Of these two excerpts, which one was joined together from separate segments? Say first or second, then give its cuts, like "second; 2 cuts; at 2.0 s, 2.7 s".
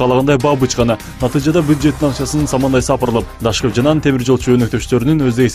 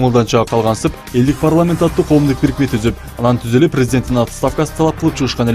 first; 1 cut; at 3.2 s